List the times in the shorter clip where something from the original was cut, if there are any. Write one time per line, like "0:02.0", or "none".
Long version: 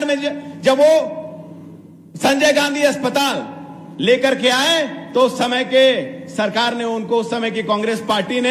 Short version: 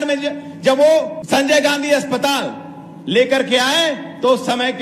0:01.2